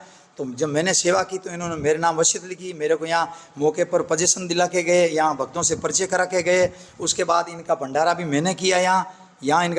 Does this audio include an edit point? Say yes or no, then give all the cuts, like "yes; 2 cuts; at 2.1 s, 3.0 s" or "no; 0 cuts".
no; 0 cuts